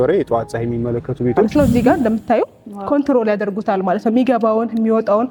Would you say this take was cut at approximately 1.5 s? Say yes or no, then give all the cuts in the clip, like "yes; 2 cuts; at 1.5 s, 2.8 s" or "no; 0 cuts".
yes; 1 cut; at 1.5 s